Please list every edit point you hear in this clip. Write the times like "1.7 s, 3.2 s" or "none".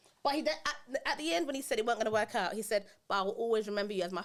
none